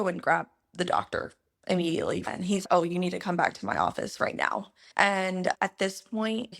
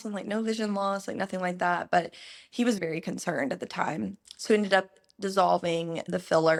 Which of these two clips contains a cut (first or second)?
first